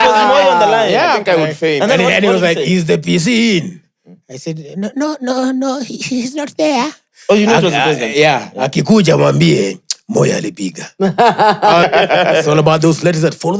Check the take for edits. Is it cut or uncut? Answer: cut